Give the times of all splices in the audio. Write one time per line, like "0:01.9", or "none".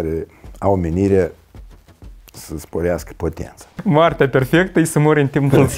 0:03.7